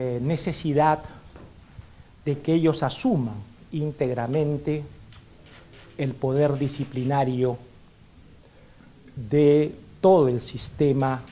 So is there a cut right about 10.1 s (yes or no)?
yes